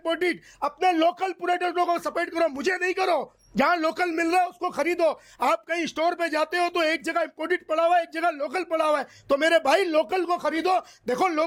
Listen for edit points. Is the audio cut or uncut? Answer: uncut